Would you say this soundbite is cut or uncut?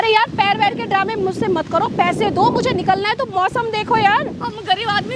uncut